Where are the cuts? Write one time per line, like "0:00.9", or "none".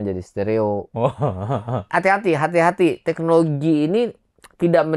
0:01.8

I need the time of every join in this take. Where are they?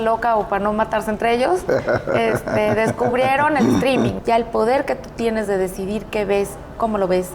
0:04.2

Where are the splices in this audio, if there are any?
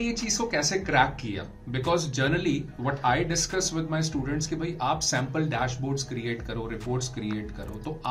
none

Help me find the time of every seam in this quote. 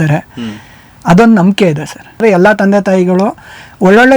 0:02.2

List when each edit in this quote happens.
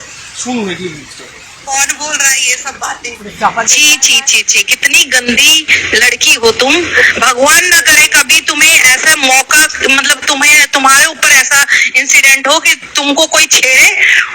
0:01.5

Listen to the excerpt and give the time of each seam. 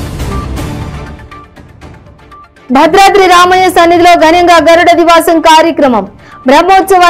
0:00.9
0:02.4

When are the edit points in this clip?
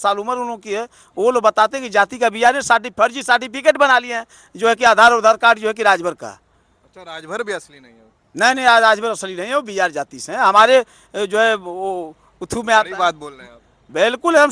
none

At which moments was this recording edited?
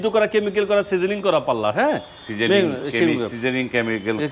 none

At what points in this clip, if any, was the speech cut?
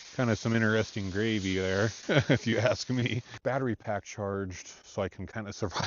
0:03.3

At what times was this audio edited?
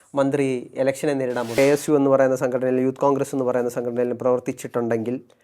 0:01.5

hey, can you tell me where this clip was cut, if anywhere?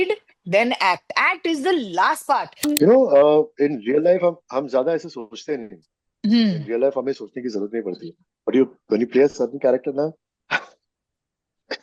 0:02.5

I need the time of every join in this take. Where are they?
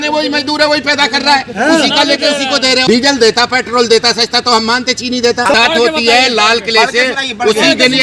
0:02.8
0:05.5

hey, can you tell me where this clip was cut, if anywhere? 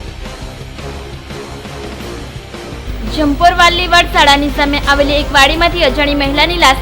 0:02.8

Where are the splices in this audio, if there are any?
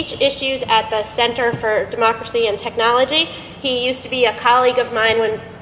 0:01.6

